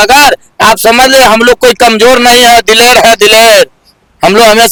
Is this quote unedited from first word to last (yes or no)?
yes